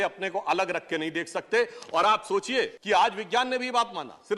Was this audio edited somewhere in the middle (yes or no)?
yes